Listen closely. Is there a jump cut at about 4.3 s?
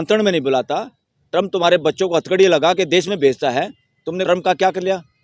yes; 1 cut; at 4.3 s

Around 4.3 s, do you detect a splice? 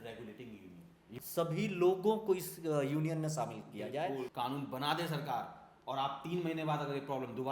yes; 2 cuts; at 1.1 s, 4.3 s

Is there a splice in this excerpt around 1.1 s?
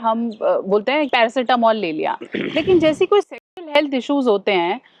yes; 1 cut; at 1.1 s

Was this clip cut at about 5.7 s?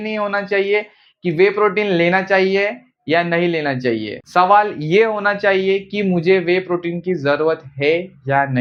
no; 0 cuts

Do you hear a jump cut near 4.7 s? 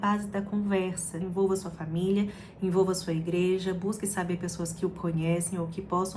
no; 1 cut; at 1.2 s

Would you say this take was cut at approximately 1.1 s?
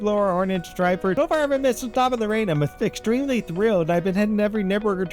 yes; 1 cut; at 1.1 s

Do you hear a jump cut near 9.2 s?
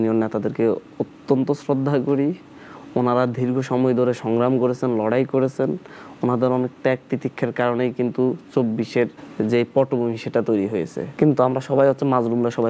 yes; 2 cuts; at 9.2 s, 11.0 s

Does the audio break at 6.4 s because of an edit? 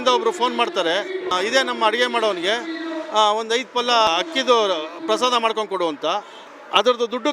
no; 2 cuts; at 1.3 s, 4.1 s

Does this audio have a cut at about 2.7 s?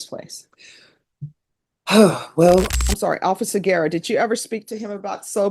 yes; 1 cut; at 2.7 s

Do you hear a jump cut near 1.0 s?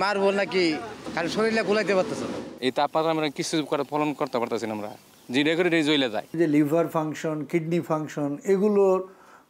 yes; 3 cuts; at 1.0 s, 2.5 s, 6.3 s

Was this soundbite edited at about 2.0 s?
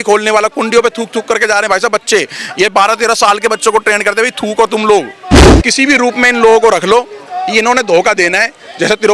no; 1 cut; at 5.6 s

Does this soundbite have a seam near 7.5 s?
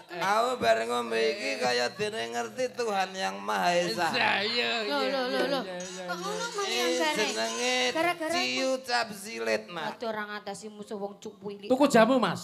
no; 1 cut; at 9.9 s

